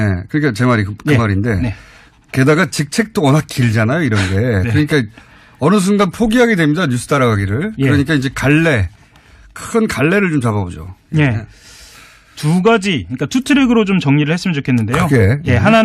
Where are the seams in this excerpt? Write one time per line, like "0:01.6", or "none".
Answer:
0:04.7